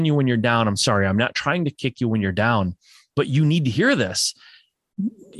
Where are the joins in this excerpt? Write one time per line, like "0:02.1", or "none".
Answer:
none